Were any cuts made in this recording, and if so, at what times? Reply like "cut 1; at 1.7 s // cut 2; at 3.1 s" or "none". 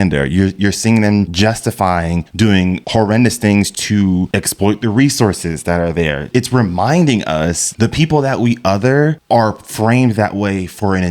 cut 1; at 1.3 s // cut 2; at 2.5 s // cut 3; at 4.3 s // cut 4; at 6.3 s // cut 5; at 7.7 s